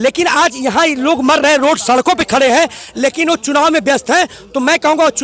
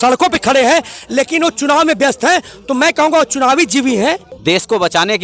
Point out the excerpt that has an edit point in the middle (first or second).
second